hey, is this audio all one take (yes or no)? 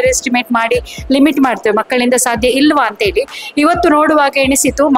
yes